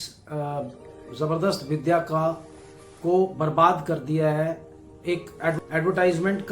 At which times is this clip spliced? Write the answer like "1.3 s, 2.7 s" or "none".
5.6 s